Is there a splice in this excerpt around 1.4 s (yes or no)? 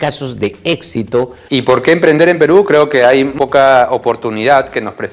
yes